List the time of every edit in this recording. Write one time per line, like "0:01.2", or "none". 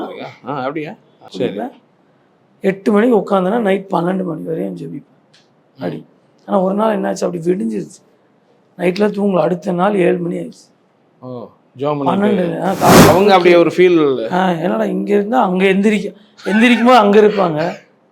0:01.2
0:13.1

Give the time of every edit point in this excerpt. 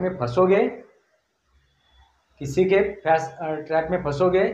none

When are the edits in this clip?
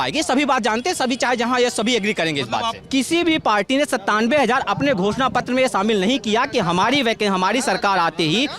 0:02.8

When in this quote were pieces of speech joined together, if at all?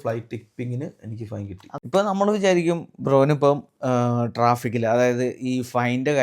0:01.7

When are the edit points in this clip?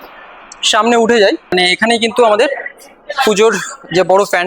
0:01.5

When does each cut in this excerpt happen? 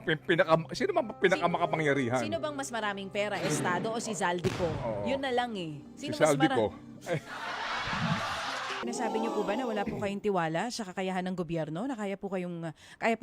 0:08.8

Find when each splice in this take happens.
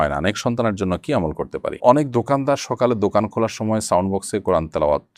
0:01.8

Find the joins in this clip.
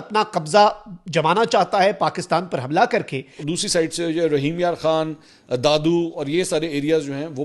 0:03.4

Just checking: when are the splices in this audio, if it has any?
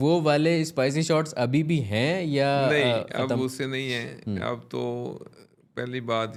none

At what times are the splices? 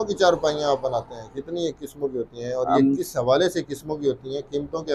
none

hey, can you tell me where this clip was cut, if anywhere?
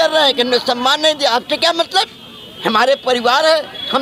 none

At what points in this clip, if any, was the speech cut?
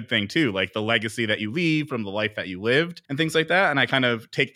0:03.0

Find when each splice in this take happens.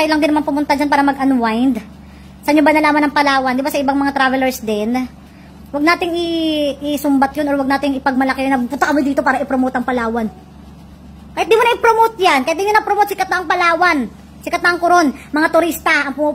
none

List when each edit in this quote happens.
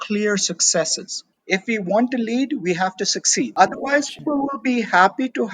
0:01.3
0:03.5
0:04.2

